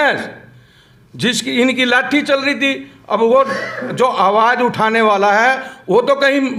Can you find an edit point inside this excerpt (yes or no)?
no